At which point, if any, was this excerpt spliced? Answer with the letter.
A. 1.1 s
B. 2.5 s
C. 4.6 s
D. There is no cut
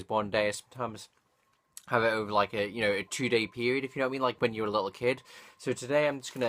B